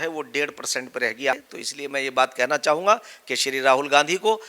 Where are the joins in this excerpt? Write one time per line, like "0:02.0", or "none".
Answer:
0:01.5